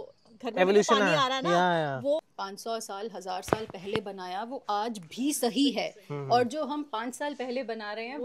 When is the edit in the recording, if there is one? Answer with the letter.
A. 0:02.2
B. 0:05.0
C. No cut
A